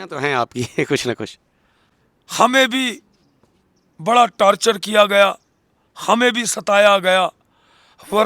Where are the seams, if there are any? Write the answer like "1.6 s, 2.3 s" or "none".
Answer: none